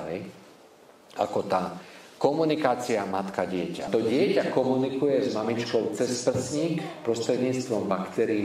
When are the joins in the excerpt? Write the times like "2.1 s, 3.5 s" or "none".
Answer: 3.9 s